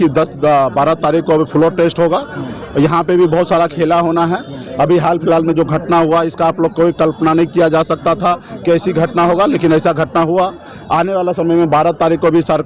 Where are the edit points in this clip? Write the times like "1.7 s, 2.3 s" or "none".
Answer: none